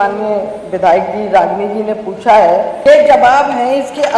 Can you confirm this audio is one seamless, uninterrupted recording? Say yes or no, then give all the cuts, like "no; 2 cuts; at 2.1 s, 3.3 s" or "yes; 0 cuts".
no; 1 cut; at 2.7 s